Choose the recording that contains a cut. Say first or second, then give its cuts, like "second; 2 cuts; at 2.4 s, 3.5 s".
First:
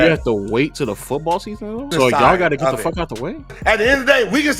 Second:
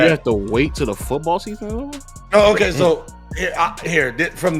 first; 2 cuts; at 1.9 s, 3.6 s